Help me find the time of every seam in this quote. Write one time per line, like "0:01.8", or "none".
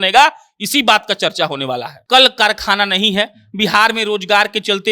0:01.9